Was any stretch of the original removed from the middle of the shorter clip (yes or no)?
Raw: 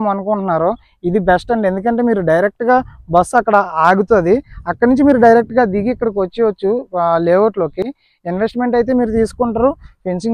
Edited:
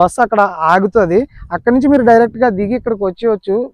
no